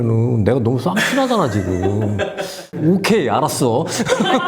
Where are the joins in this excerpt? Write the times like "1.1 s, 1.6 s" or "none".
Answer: 2.6 s